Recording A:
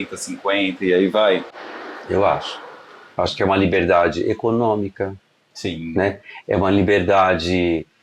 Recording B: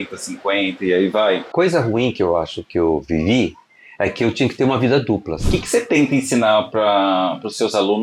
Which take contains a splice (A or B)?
B